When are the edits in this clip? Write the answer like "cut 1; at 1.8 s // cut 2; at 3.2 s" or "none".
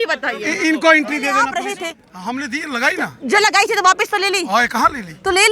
cut 1; at 1.3 s